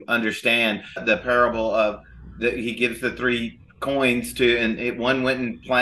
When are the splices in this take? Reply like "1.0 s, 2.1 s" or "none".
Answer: 1.0 s